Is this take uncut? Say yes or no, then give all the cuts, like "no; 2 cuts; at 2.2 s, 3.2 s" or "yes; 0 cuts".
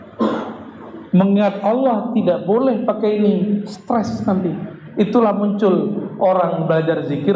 yes; 0 cuts